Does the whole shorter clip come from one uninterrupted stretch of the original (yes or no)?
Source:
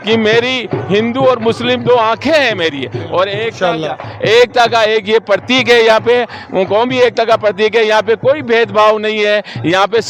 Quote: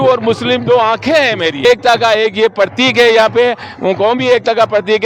no